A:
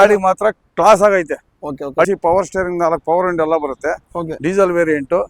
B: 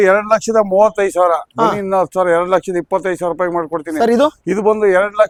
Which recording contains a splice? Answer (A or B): A